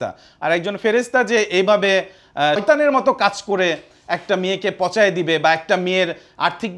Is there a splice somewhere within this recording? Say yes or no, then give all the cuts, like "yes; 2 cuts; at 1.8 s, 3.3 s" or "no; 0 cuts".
yes; 1 cut; at 2.6 s